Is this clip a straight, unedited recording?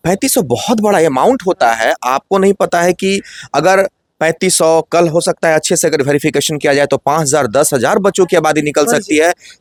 yes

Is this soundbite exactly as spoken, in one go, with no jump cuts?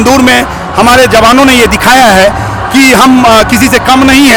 yes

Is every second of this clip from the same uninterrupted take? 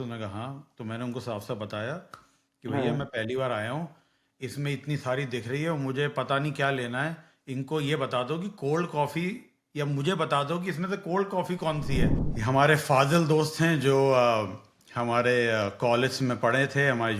no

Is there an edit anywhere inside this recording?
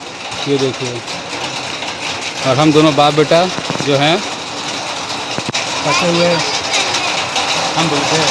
no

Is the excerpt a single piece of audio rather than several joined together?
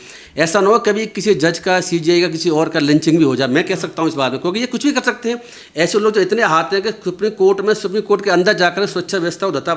yes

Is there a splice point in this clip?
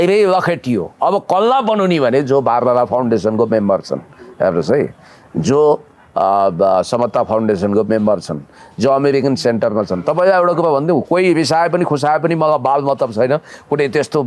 no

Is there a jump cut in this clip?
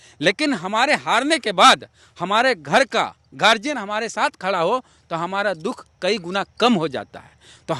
no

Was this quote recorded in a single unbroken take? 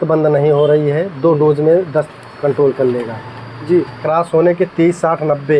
no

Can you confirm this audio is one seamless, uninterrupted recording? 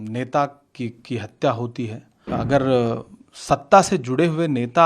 no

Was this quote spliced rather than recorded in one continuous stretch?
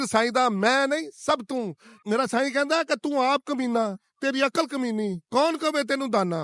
yes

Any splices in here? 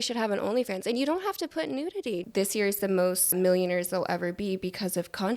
yes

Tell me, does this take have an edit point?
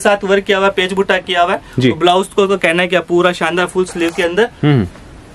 no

